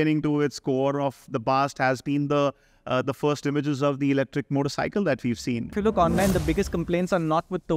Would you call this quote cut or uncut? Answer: cut